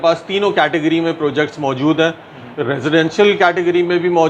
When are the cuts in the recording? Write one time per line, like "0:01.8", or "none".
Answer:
none

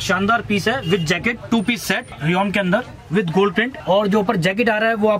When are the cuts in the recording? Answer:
0:02.1

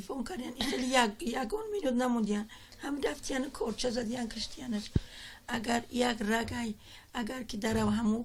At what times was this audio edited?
0:05.9

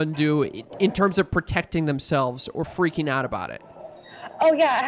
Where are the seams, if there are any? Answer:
none

